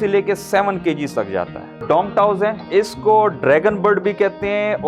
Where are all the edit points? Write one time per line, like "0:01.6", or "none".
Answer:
0:01.7
0:02.7

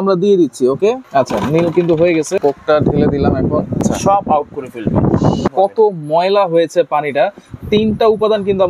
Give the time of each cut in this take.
0:01.0
0:02.4
0:03.8
0:05.5

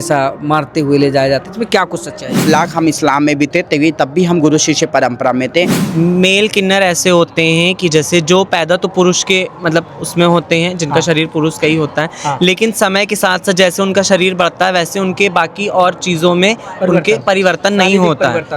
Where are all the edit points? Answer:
0:02.5
0:05.8

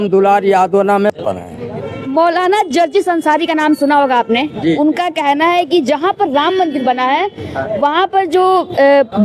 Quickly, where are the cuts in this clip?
none

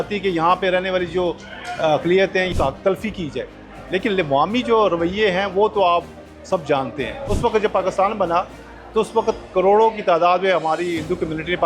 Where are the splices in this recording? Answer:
0:02.5
0:07.2

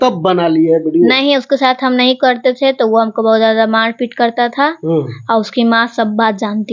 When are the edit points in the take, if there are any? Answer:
none

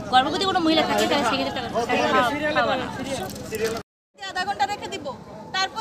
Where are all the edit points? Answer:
0:04.0

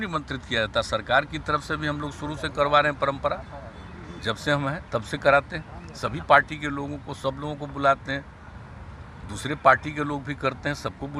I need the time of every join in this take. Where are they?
none

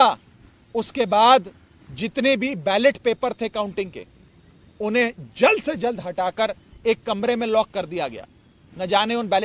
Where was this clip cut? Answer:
none

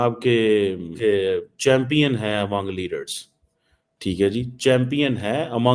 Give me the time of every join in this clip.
0:00.9

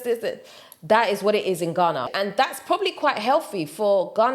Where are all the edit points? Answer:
0:02.1

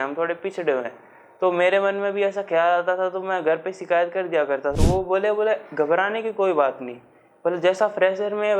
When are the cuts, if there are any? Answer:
0:04.7

